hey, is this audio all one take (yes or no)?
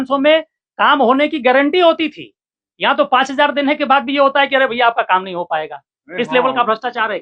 yes